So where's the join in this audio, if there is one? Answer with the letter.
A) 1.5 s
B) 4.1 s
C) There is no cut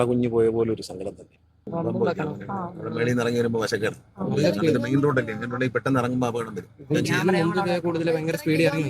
A